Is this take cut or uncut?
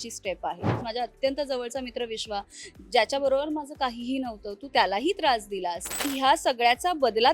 cut